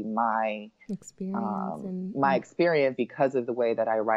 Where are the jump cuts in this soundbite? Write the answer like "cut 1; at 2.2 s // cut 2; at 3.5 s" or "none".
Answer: cut 1; at 2.9 s